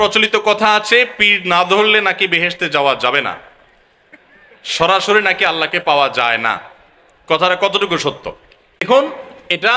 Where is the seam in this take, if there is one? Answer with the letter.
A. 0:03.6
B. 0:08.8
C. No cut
B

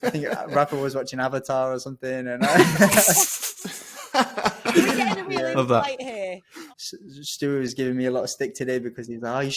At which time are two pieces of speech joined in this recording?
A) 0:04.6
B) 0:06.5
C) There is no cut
B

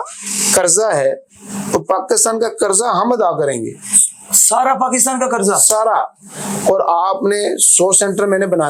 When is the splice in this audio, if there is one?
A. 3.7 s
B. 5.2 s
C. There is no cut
C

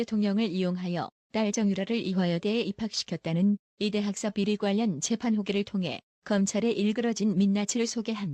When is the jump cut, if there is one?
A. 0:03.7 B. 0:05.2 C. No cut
B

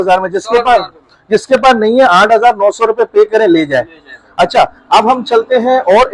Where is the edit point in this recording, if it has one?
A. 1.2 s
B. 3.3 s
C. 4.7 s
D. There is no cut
D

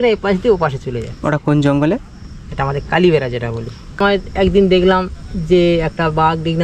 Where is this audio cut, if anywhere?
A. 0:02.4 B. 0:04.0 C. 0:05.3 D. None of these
B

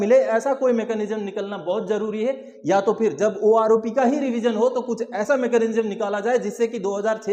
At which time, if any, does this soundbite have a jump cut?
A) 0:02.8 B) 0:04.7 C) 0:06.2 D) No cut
D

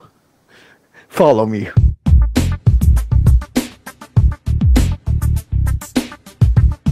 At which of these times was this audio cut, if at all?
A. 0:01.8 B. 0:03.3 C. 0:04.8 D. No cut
A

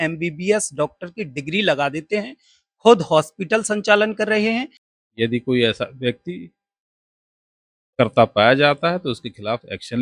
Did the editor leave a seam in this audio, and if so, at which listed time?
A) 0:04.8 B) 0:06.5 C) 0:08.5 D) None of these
A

